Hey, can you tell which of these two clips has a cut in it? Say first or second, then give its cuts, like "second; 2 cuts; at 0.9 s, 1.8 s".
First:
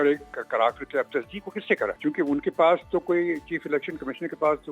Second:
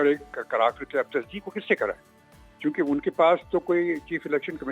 first; 1 cut; at 2.0 s